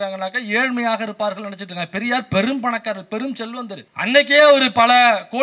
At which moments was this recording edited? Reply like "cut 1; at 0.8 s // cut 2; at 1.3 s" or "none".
none